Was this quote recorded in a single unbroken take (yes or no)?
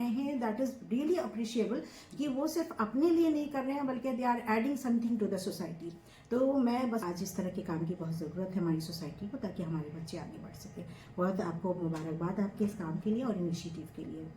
no